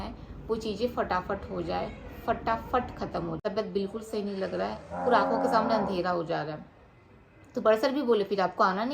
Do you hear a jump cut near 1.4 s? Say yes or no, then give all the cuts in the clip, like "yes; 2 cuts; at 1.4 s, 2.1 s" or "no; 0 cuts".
no; 1 cut; at 3.4 s